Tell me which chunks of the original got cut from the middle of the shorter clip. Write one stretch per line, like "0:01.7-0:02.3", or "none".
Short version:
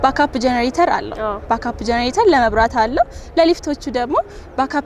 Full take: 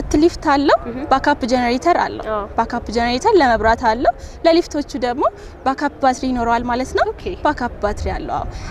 none